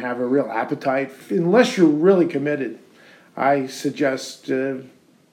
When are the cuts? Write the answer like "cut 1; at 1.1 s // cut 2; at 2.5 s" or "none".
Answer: cut 1; at 1.2 s